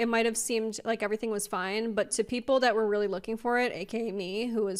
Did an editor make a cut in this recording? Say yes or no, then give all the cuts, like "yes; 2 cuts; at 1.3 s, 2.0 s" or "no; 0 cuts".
no; 0 cuts